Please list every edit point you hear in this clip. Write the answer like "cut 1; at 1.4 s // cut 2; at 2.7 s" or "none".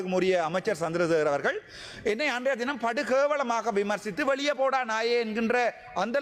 none